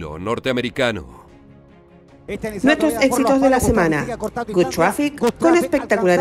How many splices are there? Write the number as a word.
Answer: one